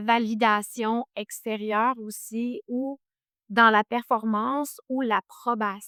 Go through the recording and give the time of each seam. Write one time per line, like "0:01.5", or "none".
none